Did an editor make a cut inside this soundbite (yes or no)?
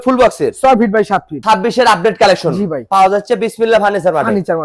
yes